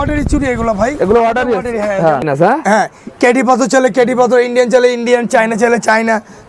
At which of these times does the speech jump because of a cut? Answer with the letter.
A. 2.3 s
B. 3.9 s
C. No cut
A